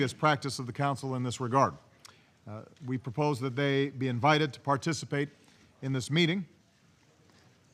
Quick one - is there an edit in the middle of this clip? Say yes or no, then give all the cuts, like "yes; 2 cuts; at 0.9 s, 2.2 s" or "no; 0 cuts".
no; 0 cuts